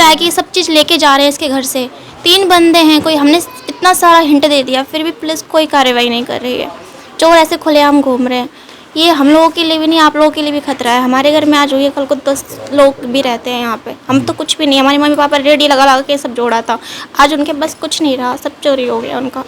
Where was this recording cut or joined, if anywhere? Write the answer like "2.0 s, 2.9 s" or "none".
none